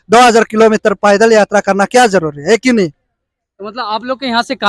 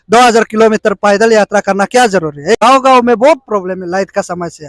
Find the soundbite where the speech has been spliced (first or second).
second